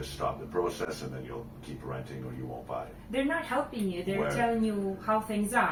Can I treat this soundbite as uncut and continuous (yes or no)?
yes